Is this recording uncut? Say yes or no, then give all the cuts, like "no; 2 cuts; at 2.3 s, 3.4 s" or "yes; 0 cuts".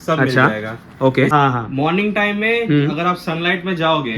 no; 1 cut; at 1.3 s